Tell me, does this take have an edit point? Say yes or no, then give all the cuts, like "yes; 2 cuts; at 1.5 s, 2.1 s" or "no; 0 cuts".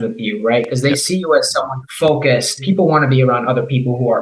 yes; 2 cuts; at 1.8 s, 2.6 s